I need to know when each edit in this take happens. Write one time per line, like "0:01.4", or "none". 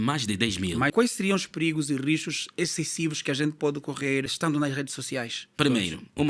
0:00.9
0:05.4